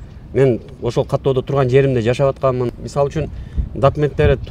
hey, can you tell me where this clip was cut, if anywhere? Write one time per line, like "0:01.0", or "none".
0:02.7